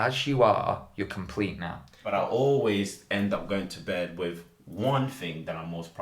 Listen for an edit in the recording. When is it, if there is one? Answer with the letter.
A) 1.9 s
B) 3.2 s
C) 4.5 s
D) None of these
A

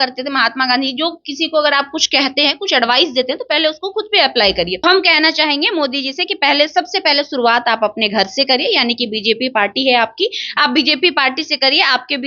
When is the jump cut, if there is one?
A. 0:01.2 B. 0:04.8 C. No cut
B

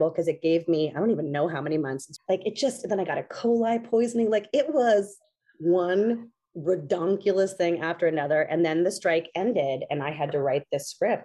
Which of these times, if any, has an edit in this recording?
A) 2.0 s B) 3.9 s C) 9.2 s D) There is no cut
A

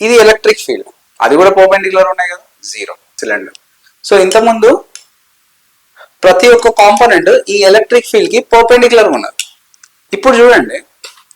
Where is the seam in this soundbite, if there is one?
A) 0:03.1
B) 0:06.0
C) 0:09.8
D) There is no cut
A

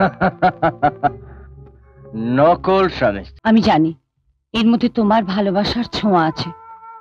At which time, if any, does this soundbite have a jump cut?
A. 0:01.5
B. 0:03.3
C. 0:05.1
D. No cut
B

